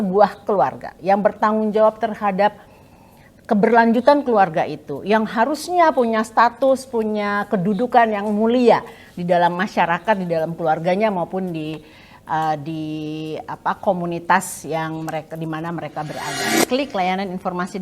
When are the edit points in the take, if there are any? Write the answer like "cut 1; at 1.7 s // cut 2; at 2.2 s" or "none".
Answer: cut 1; at 16.6 s